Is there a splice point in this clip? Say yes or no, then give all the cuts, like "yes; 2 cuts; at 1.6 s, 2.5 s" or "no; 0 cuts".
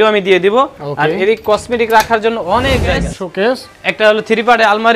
yes; 1 cut; at 3.2 s